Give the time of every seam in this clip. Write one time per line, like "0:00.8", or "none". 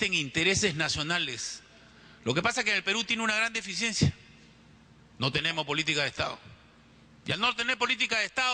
0:06.1